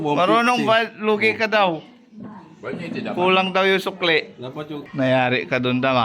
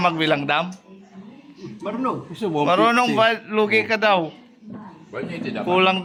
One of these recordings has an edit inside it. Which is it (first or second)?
first